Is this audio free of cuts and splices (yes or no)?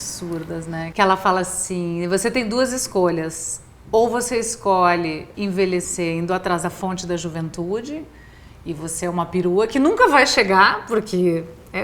no